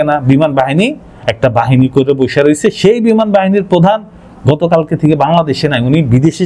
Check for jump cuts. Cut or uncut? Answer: uncut